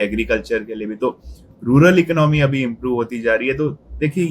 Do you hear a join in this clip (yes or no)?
no